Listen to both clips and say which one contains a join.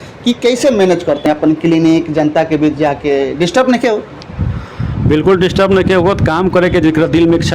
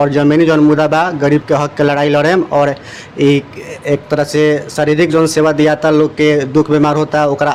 first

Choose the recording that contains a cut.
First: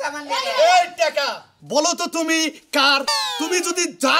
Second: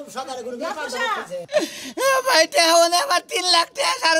second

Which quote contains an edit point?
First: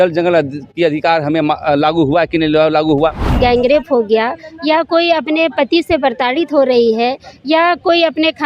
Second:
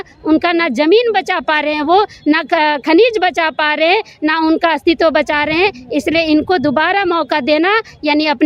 first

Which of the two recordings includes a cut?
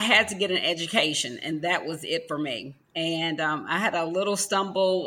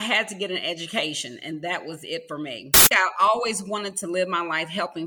second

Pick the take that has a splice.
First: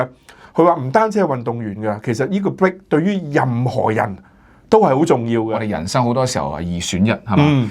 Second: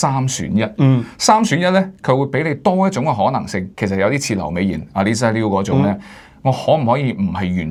first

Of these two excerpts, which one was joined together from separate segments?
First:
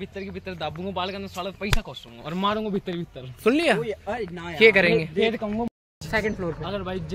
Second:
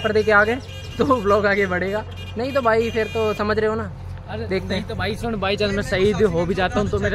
first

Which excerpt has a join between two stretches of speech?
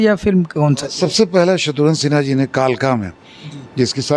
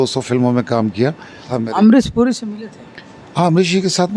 second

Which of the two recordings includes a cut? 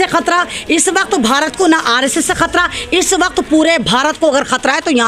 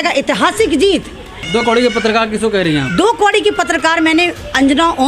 second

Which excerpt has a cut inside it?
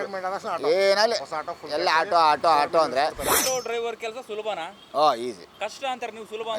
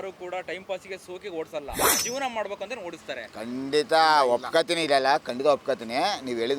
first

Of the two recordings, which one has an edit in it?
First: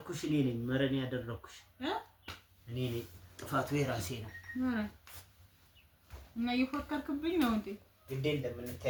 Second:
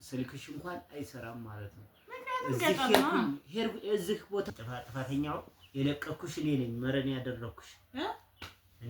second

